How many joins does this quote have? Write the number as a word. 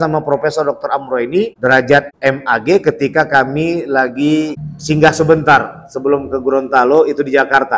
two